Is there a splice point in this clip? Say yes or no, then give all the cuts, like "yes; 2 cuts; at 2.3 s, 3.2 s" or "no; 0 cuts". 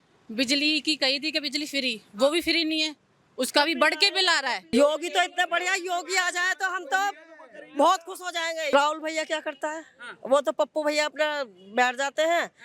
yes; 2 cuts; at 4.7 s, 8.7 s